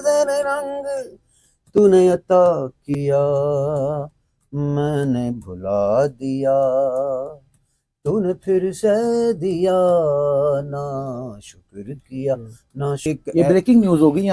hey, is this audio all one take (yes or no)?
no